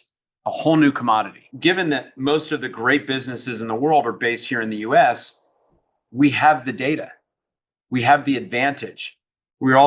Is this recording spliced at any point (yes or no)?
yes